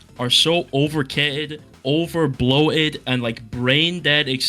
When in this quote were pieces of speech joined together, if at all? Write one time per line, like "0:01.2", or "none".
none